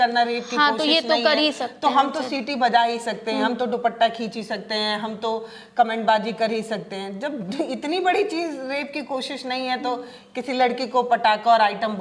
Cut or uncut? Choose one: uncut